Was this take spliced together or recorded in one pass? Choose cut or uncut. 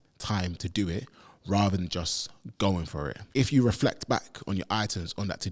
cut